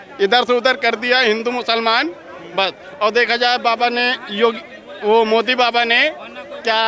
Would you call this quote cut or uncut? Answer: uncut